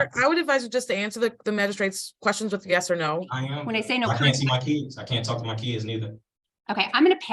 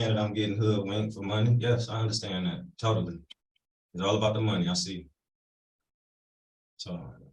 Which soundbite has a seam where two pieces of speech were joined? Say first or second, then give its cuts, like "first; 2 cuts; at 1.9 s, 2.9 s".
first; 1 cut; at 3.5 s